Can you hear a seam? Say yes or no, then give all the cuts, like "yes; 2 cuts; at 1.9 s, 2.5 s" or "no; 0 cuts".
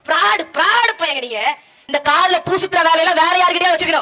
yes; 1 cut; at 1.7 s